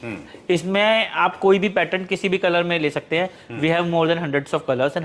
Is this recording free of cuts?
yes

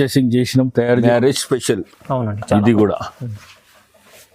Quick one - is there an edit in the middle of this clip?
yes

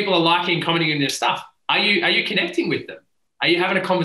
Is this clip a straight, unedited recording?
yes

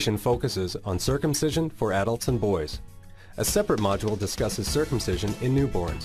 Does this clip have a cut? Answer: no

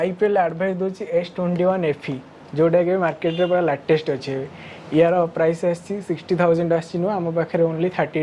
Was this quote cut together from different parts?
no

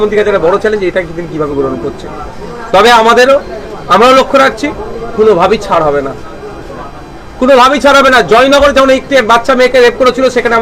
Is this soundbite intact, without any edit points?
yes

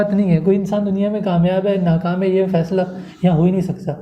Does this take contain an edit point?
no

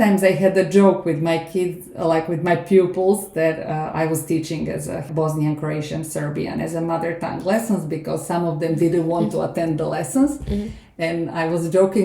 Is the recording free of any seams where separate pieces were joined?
no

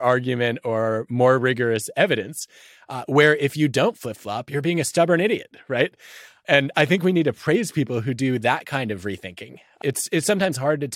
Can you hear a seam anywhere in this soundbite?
yes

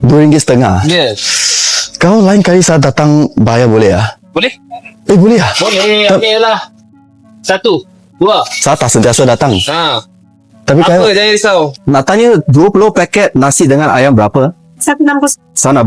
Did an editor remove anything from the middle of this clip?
yes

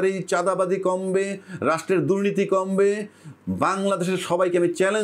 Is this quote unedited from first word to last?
yes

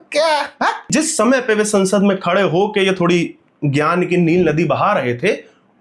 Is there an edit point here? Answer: yes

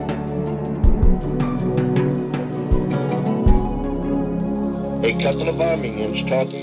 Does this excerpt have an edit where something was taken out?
no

